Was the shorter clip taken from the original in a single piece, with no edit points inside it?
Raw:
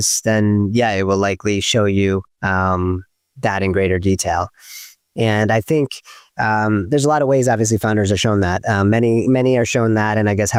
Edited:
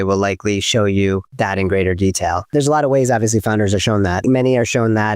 no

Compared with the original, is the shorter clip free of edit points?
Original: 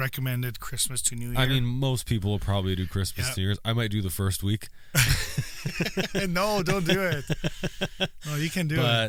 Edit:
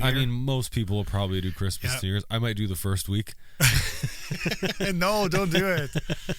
yes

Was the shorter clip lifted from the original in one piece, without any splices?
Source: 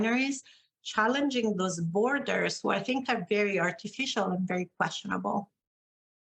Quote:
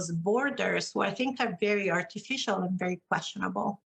yes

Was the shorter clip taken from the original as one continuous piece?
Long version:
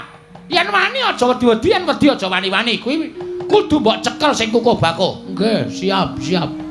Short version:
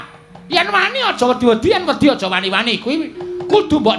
yes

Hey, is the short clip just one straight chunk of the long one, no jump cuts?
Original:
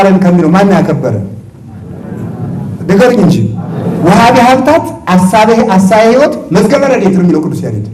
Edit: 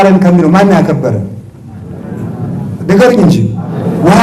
yes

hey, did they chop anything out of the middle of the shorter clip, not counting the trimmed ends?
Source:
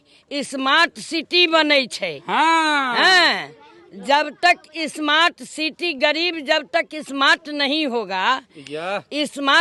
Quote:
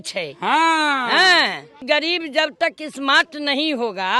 yes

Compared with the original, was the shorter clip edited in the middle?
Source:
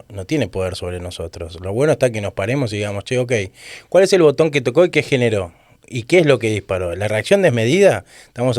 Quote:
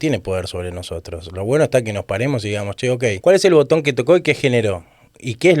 yes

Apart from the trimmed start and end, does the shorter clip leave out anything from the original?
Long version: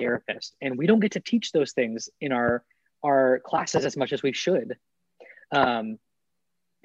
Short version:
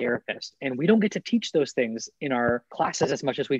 yes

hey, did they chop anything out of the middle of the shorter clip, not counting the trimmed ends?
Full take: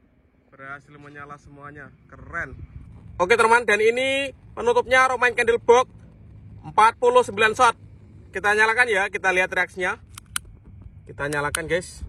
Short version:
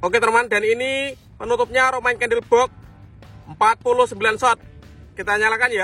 no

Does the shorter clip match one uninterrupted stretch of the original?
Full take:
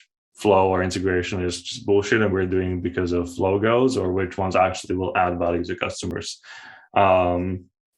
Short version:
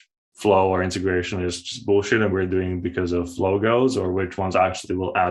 yes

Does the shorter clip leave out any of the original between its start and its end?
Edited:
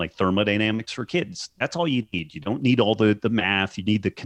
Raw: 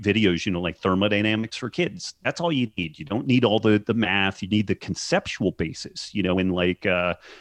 no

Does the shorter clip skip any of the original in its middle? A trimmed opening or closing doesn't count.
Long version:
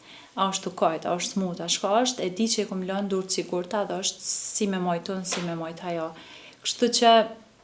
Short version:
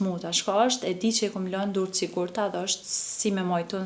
no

